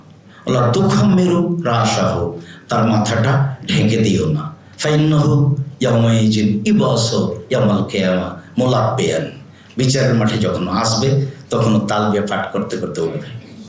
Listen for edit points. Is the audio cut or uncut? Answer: uncut